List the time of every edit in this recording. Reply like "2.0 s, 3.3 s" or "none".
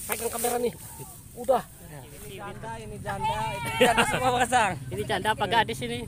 2.3 s